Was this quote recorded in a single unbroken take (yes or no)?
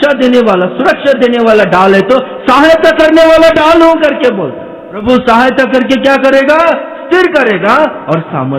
no